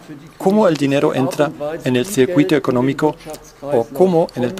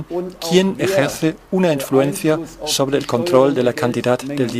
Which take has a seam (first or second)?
first